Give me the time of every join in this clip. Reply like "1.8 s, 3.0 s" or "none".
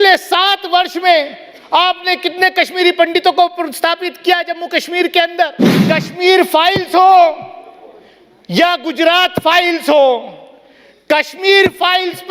5.7 s